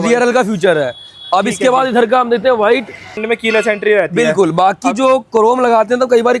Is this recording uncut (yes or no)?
no